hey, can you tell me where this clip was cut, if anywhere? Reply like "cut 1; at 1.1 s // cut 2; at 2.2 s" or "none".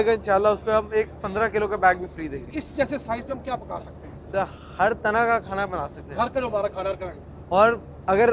cut 1; at 2.4 s